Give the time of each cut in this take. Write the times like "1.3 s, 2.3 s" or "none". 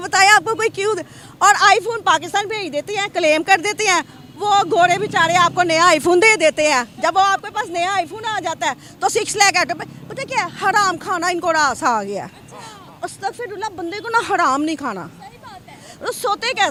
none